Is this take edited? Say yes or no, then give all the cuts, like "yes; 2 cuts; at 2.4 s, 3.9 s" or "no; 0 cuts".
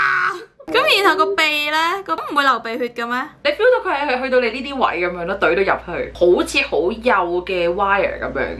yes; 2 cuts; at 2.2 s, 3.3 s